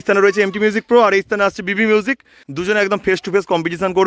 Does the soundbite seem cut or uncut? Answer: cut